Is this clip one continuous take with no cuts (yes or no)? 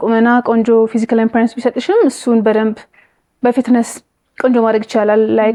yes